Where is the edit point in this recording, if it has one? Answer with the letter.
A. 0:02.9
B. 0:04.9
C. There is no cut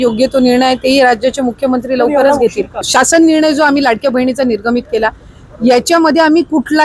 A